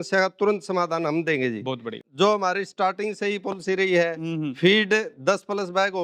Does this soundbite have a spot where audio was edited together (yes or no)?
yes